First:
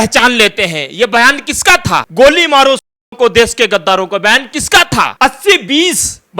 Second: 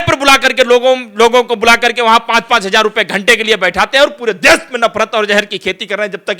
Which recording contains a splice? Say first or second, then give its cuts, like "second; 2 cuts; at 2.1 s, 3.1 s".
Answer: first; 2 cuts; at 2.1 s, 5.1 s